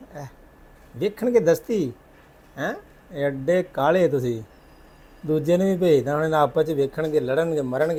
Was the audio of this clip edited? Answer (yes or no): no